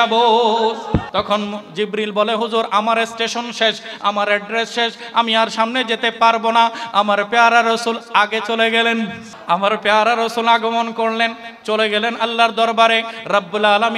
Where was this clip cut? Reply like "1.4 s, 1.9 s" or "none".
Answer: 1.1 s, 9.3 s